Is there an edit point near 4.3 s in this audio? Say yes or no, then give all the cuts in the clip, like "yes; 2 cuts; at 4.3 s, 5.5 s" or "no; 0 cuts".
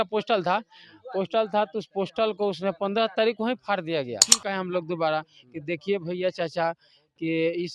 yes; 1 cut; at 4.3 s